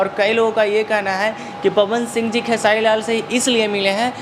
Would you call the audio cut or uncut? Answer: uncut